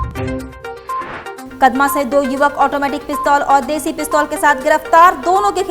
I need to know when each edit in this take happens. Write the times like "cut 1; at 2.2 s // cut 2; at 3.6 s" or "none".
cut 1; at 1.4 s